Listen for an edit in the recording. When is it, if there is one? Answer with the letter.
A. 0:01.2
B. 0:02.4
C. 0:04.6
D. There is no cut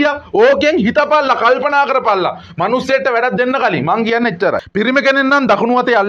C